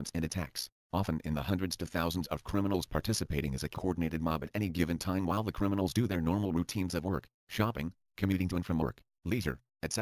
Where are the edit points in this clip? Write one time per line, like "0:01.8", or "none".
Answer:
none